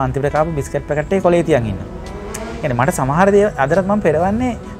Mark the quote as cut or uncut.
uncut